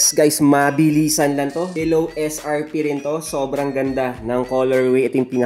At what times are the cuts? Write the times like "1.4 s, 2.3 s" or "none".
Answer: none